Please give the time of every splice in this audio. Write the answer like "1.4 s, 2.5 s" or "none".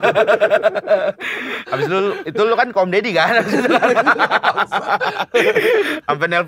none